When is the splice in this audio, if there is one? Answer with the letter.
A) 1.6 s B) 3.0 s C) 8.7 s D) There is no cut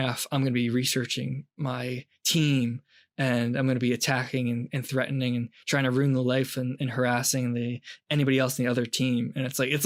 D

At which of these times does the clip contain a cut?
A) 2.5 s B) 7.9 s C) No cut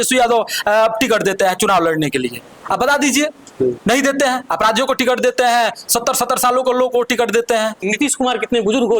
B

